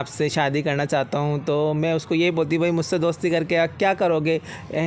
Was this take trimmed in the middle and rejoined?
no; 0 cuts

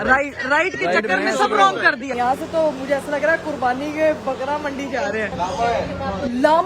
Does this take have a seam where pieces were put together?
yes; 2 cuts; at 2.1 s, 5.3 s

